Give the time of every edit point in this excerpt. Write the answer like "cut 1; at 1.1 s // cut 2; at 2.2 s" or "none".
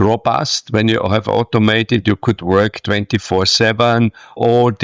none